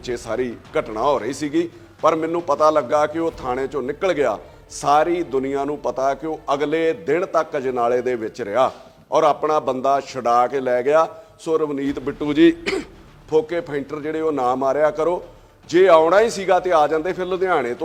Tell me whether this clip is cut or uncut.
uncut